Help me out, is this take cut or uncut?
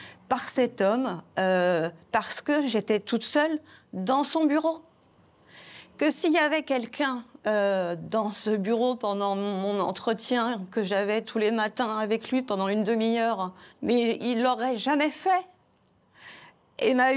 uncut